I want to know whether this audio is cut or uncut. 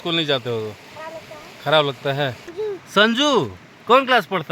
cut